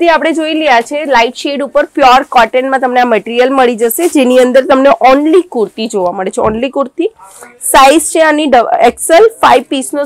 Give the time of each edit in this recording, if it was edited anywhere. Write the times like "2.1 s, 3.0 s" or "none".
none